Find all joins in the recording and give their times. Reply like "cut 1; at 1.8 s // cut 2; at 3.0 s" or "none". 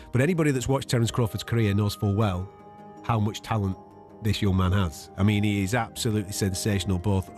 none